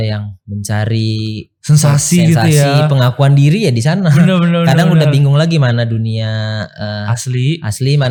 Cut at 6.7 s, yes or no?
no